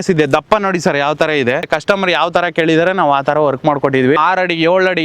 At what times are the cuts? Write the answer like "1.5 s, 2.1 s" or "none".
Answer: 1.7 s, 4.2 s